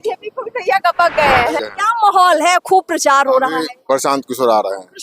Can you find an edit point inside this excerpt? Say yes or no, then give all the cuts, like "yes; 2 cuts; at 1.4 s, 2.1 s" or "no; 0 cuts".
yes; 1 cut; at 1.6 s